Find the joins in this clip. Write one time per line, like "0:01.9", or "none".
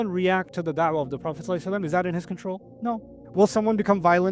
0:02.9